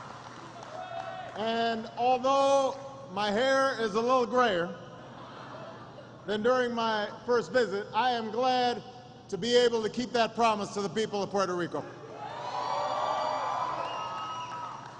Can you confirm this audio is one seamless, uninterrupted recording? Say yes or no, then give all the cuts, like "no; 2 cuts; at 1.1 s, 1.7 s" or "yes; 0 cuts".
yes; 0 cuts